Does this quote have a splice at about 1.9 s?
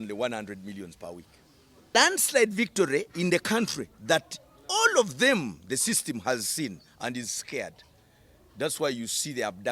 yes; 1 cut; at 1.9 s

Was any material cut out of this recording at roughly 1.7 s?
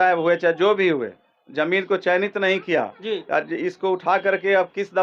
no; 0 cuts

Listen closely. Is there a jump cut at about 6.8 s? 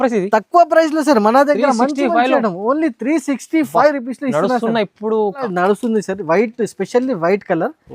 no; 1 cut; at 5.4 s

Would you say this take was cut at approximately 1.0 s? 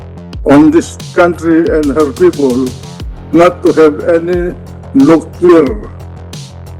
no; 1 cut; at 5.9 s

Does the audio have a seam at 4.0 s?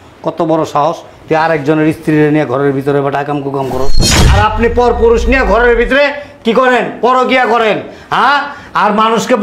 yes; 1 cut; at 4.0 s

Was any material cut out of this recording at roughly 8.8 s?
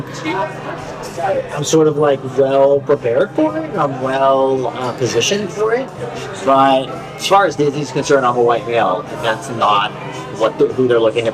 no; 1 cut; at 6.9 s

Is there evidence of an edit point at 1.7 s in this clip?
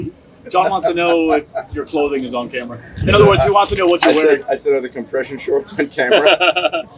yes; 1 cut; at 1.7 s

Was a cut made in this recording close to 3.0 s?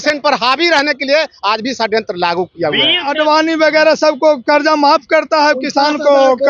yes; 1 cut; at 3.0 s

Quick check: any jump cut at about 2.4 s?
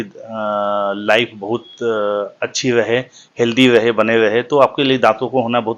no; 0 cuts

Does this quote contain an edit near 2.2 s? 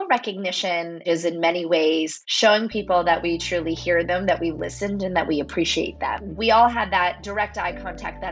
yes; 4 cuts; at 1.0 s, 2.2 s, 6.3 s, 7.2 s

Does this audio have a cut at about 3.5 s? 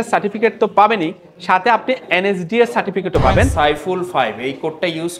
yes; 1 cut; at 3.5 s

